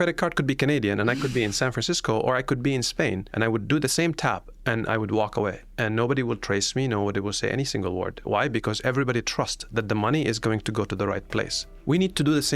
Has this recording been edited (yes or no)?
yes